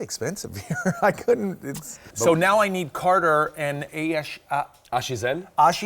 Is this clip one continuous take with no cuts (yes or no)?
no